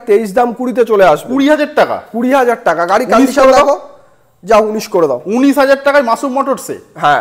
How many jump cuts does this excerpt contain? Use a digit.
0